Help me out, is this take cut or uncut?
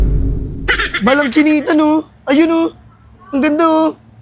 uncut